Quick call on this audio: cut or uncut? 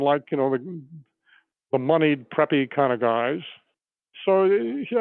cut